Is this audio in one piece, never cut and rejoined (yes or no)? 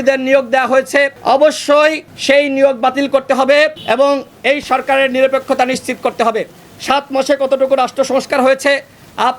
no